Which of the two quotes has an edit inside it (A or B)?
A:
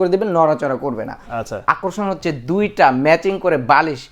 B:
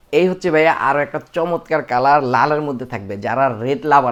A